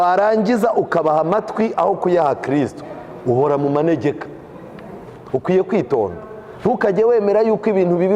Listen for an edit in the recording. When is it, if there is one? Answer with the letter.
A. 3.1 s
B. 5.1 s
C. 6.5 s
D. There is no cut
B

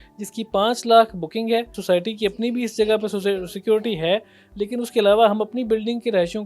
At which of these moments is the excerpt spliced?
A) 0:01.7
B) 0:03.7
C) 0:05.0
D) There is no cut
A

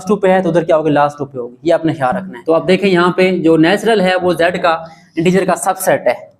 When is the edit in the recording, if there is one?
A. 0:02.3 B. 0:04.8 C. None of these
A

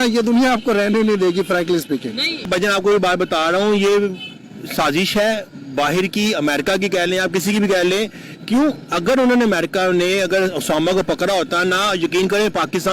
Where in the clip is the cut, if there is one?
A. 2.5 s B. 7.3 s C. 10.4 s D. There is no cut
A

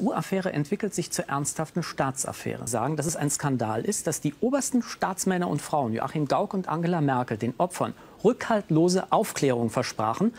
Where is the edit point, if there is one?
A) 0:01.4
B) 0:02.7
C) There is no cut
B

